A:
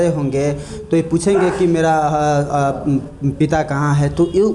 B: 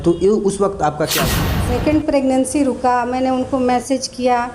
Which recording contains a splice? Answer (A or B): B